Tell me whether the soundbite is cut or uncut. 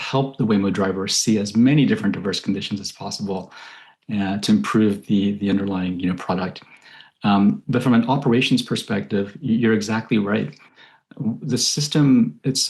uncut